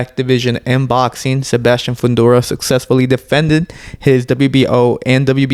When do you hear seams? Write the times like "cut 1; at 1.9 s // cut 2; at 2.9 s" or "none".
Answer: none